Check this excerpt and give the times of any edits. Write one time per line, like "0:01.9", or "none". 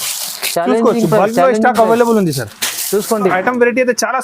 0:03.3

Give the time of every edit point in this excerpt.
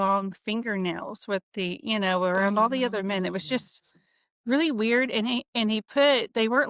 none

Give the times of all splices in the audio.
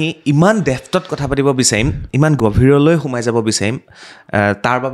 0:02.4

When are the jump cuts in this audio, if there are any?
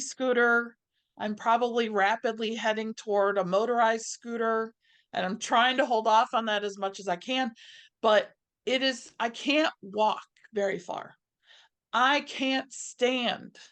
none

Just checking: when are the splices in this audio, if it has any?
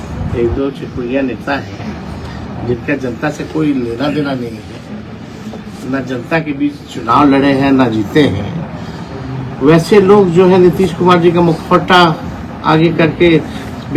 none

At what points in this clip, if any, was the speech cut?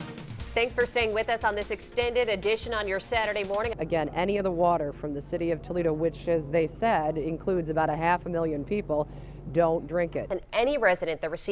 0:03.7
0:10.3

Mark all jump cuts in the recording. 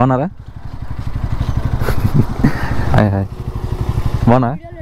0:02.9

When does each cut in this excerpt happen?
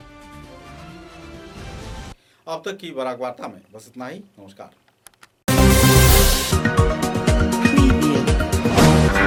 none

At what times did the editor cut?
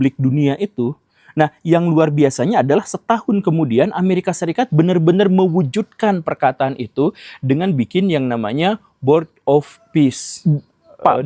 0:10.3

